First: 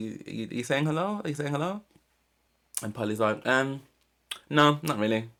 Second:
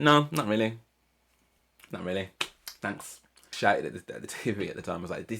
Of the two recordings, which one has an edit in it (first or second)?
second